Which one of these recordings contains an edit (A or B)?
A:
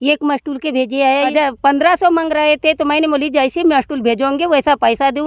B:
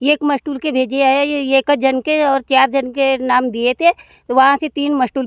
A